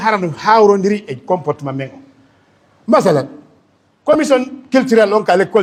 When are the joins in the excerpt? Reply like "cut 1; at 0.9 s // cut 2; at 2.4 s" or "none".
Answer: none